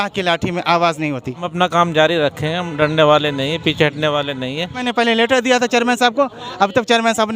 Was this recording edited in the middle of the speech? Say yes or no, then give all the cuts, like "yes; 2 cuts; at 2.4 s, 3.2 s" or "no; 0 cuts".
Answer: yes; 2 cuts; at 1.5 s, 4.8 s